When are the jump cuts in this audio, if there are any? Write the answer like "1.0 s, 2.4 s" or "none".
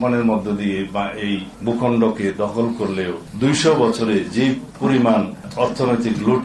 1.5 s, 3.2 s, 4.7 s, 5.5 s